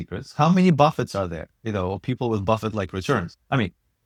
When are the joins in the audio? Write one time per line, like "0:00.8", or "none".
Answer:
none